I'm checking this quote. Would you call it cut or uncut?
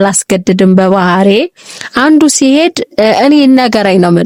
uncut